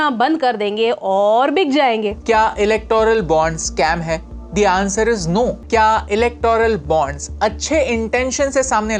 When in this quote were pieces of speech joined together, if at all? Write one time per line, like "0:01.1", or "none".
0:02.2
0:05.6